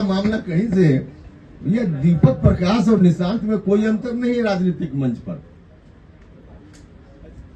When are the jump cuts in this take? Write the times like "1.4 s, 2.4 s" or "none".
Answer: none